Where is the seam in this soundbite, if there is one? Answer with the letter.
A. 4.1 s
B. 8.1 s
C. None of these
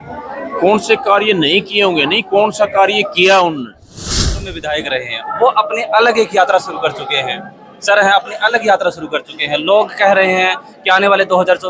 A